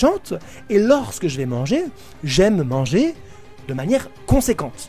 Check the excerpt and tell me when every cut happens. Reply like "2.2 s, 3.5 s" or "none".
none